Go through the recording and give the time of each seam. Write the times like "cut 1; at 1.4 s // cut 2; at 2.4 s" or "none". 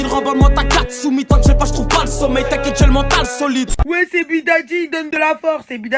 cut 1; at 3.7 s